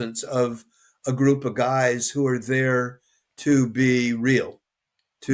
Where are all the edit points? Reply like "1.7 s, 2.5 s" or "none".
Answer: none